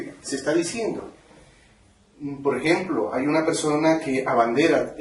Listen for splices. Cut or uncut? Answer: cut